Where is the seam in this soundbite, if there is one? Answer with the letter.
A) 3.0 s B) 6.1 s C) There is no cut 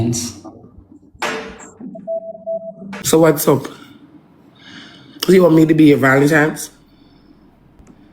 A